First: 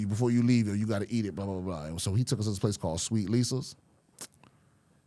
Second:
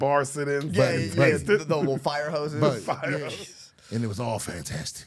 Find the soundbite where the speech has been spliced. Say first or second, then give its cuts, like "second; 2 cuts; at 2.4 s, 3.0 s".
second; 1 cut; at 3.3 s